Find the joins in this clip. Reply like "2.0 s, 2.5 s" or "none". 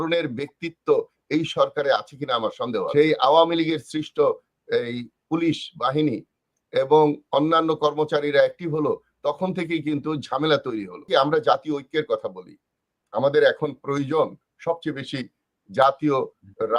2.9 s, 11.1 s